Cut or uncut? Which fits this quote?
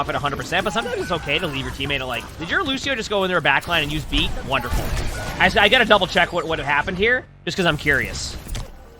uncut